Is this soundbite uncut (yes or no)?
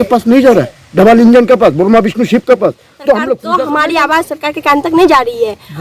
no